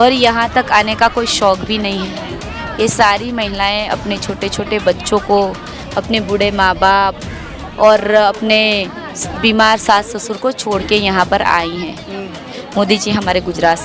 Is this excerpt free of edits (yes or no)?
no